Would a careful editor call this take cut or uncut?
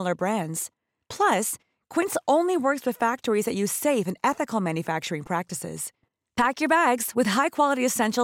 uncut